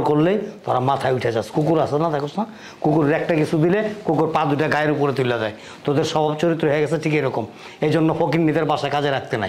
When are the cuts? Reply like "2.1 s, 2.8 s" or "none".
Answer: none